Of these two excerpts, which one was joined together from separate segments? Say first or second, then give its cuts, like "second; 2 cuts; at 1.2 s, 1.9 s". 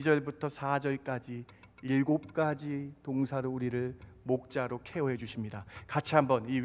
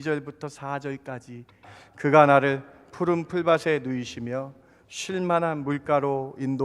second; 1 cut; at 1.7 s